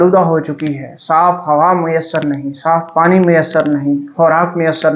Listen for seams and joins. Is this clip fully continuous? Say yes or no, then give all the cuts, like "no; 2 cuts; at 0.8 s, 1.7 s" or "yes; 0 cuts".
yes; 0 cuts